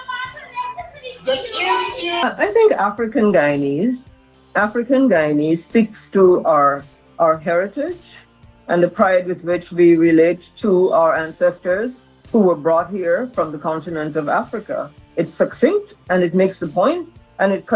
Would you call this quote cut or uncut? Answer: cut